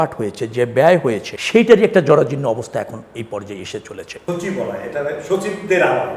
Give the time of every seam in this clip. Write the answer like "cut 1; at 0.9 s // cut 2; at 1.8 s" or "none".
cut 1; at 1.3 s // cut 2; at 4.1 s